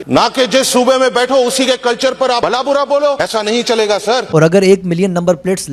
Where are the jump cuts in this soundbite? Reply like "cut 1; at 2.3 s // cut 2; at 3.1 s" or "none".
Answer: none